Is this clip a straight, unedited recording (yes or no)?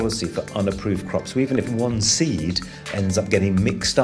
no